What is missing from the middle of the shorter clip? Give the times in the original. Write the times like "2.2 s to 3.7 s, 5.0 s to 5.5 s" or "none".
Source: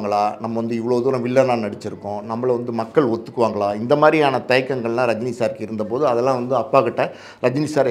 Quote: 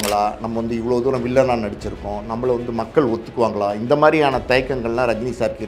none